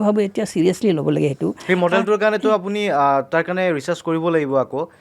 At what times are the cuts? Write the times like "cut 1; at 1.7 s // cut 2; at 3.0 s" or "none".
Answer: none